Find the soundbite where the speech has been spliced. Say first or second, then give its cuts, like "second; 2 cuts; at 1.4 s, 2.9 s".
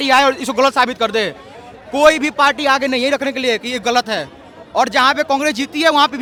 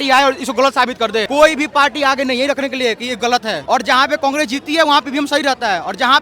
second; 2 cuts; at 1.3 s, 3.6 s